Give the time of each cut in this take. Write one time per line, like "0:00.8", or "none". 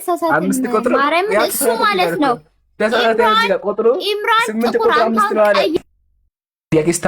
0:05.8